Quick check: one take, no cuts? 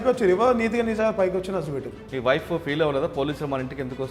no; 1 cut; at 2.0 s

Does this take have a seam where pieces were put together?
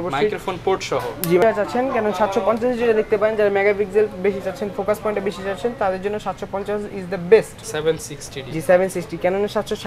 yes; 2 cuts; at 1.4 s, 7.6 s

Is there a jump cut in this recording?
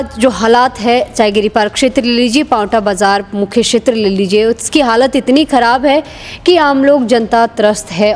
no; 0 cuts

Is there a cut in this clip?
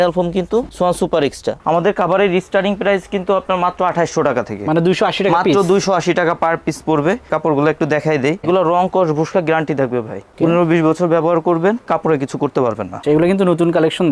yes; 4 cuts; at 1.5 s, 8.4 s, 11.9 s, 12.9 s

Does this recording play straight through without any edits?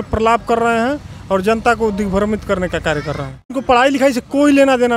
no; 1 cut; at 3.6 s

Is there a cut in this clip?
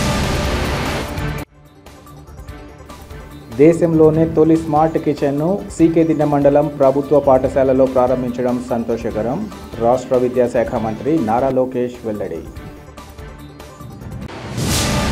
yes; 1 cut; at 1.0 s

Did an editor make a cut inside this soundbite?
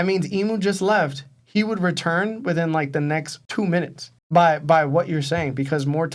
no; 0 cuts

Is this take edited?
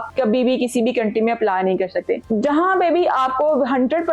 yes; 1 cut; at 2.2 s

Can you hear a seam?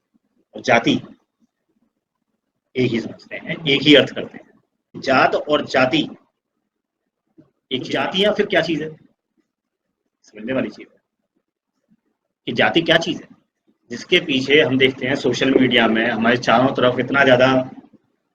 yes; 2 cuts; at 5.0 s, 7.9 s

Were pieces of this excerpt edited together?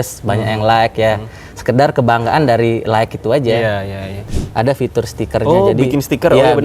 yes; 1 cut; at 4.2 s

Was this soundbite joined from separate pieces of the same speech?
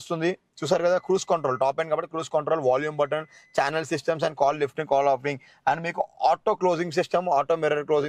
no; 0 cuts

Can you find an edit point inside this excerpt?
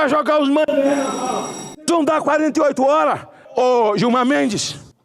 yes; 1 cut; at 3.5 s

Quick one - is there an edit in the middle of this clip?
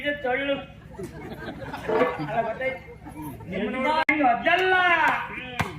yes; 1 cut; at 4.1 s

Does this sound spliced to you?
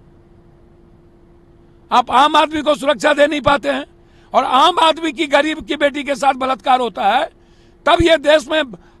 no; 0 cuts

